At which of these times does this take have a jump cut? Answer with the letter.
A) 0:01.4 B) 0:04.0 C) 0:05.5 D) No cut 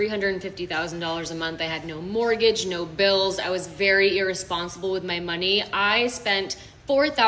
D